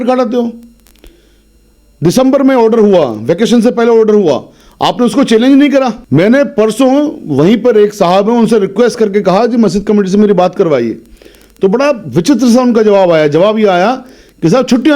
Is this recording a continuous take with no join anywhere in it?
no; 1 cut; at 6.0 s

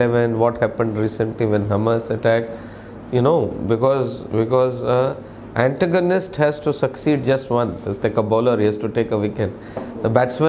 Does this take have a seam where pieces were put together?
no; 0 cuts

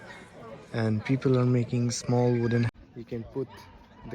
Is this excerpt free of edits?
no; 1 cut; at 2.7 s

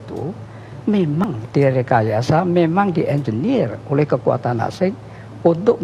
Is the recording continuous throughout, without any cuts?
no; 1 cut; at 1.2 s

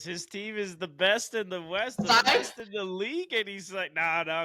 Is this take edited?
no; 0 cuts

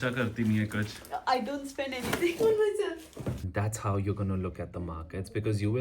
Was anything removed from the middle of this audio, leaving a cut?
yes; 1 cut; at 3.4 s

